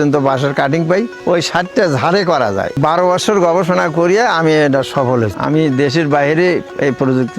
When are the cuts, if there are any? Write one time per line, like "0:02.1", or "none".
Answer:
0:01.1
0:02.8
0:05.4